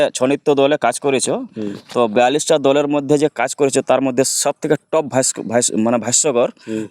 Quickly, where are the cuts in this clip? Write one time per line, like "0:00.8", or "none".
none